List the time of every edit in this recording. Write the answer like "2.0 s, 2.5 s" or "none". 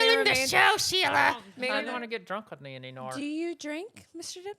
1.7 s